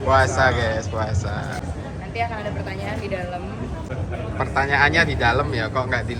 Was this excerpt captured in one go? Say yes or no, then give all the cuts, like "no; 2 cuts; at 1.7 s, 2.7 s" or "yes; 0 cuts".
no; 2 cuts; at 1.6 s, 3.9 s